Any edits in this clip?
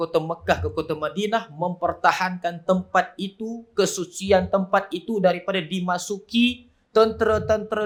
no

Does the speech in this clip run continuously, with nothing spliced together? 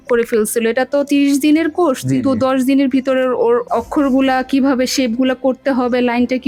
yes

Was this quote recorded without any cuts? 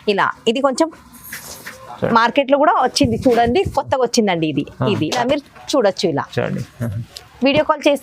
no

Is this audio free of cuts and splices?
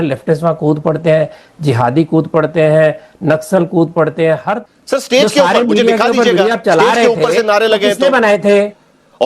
no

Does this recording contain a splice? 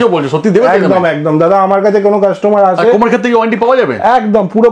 no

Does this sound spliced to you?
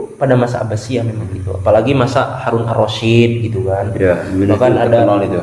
no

